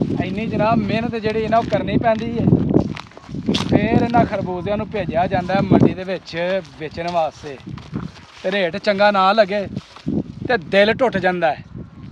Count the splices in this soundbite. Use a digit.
0